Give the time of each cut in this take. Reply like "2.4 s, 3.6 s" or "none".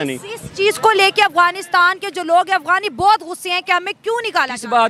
none